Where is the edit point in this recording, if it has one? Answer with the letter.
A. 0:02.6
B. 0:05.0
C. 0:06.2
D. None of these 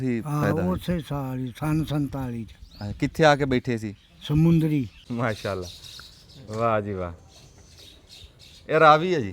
B